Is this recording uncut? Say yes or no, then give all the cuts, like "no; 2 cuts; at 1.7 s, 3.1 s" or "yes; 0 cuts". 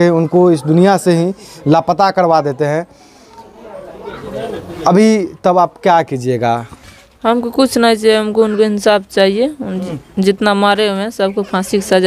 yes; 0 cuts